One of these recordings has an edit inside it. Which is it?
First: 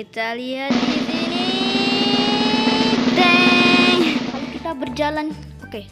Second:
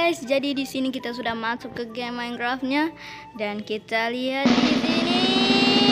first; 1 cut; at 4.3 s

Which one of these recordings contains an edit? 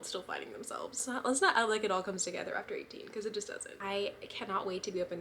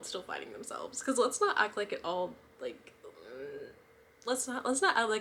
first; 2 cuts; at 1.0 s, 3.7 s

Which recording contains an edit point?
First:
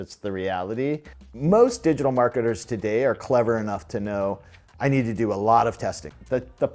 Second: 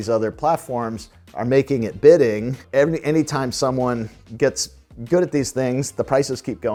first; 1 cut; at 1.1 s

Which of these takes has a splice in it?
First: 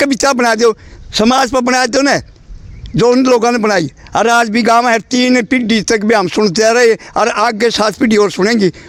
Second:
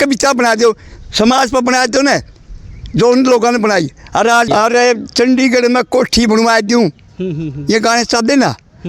second; 1 cut; at 4.5 s

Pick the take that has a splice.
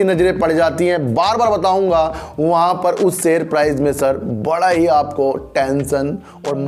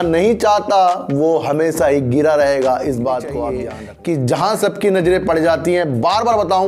second; 1 cut; at 3.7 s

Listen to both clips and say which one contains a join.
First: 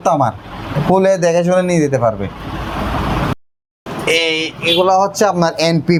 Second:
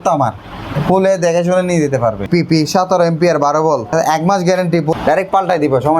second; 3 cuts; at 2.3 s, 3.9 s, 5.0 s

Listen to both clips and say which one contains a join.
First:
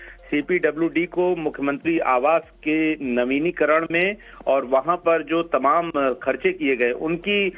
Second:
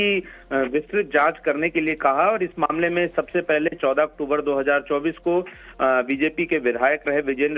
second; 1 cut; at 4.2 s

